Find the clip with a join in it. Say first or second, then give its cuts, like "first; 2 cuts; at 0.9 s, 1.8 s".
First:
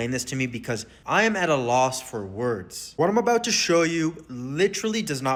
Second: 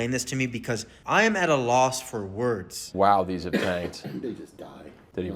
second; 1 cut; at 2.8 s